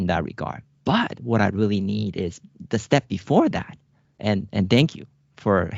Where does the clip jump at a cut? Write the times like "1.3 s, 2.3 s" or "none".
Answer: none